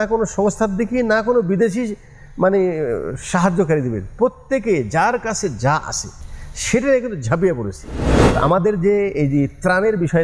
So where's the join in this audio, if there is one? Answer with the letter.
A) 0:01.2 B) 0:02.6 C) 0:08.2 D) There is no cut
C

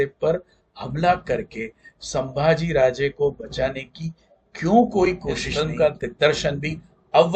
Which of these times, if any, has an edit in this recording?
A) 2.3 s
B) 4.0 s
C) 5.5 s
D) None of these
C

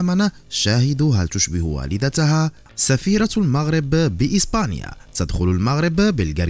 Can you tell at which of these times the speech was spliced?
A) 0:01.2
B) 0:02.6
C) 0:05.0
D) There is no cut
B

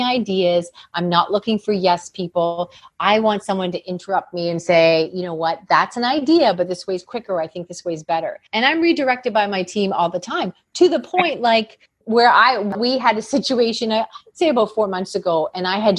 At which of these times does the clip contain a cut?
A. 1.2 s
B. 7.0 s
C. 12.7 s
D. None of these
C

